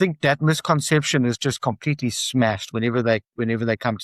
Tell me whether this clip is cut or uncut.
uncut